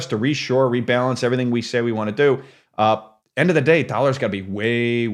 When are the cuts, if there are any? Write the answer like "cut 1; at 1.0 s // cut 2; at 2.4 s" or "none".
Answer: cut 1; at 2.9 s